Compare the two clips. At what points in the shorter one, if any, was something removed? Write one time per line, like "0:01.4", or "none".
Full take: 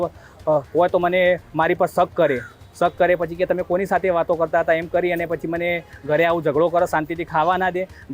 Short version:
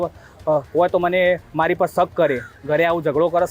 0:02.5